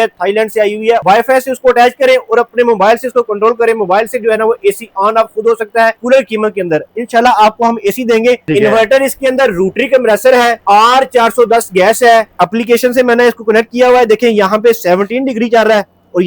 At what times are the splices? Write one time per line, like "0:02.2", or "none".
0:01.0
0:06.0
0:08.4
0:12.3